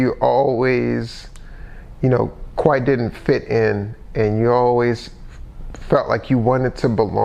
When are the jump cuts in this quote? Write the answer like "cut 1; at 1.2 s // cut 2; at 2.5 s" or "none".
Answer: none